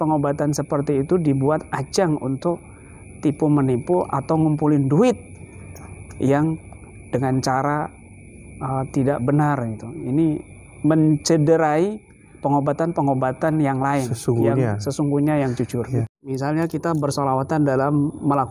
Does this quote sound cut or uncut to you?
cut